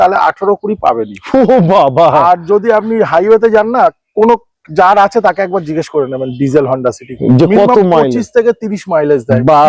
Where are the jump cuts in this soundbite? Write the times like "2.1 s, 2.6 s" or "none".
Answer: none